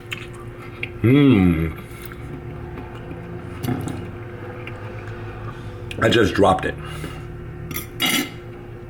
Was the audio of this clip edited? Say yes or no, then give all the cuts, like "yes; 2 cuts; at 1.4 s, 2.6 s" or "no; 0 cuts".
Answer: no; 0 cuts